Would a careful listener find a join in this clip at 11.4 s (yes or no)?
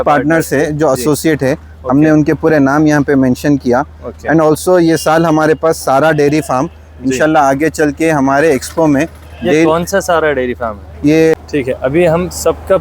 yes